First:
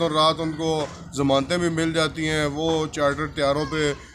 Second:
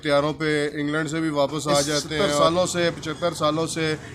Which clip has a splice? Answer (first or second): second